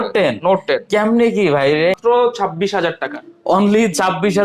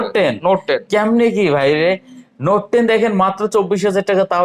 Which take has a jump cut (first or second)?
first